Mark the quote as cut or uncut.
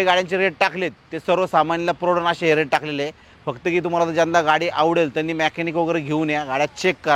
uncut